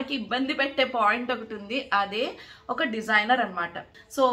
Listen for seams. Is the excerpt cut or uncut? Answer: uncut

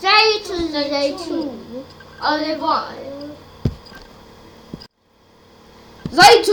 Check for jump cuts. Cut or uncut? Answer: uncut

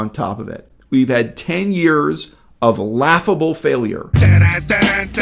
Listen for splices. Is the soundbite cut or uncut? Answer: cut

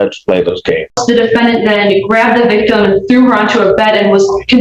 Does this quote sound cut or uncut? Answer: cut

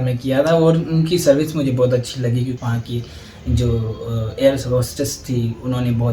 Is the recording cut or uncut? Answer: cut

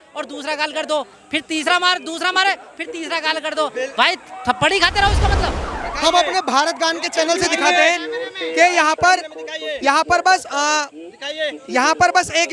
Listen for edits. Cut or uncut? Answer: cut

